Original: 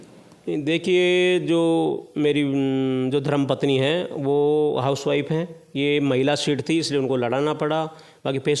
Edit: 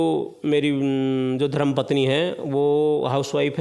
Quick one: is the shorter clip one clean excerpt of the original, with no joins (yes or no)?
yes